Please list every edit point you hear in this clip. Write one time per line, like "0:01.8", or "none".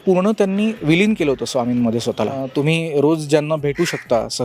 0:02.4